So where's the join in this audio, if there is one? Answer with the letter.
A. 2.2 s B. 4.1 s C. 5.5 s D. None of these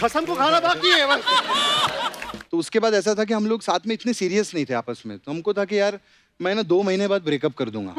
A